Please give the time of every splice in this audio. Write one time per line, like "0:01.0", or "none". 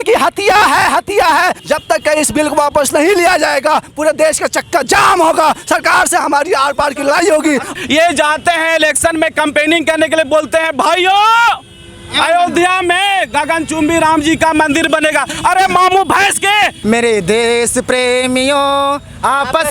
0:01.6
0:07.7
0:16.8